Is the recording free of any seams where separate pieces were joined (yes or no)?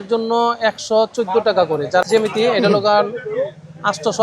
no